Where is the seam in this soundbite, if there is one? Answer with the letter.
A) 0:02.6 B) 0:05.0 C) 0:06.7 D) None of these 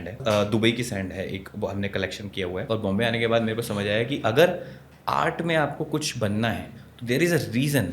A